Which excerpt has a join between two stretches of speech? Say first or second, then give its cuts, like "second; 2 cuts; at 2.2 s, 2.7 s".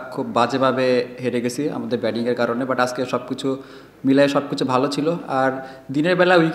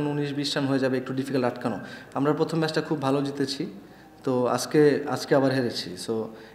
second; 1 cut; at 2.0 s